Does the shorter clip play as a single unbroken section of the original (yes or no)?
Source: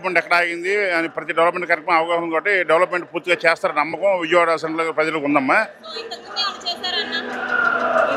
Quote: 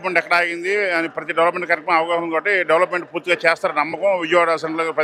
yes